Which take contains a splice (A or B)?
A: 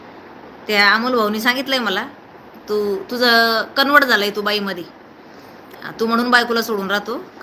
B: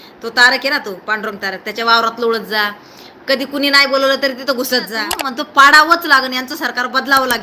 B